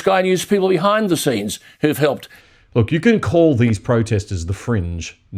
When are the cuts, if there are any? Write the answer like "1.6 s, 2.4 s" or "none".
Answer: 2.3 s